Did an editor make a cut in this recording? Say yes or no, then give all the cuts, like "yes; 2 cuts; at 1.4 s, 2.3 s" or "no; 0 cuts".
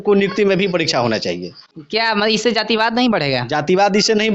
yes; 1 cut; at 1.8 s